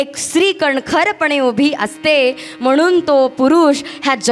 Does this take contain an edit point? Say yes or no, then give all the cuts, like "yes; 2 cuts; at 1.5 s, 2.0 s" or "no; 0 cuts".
no; 0 cuts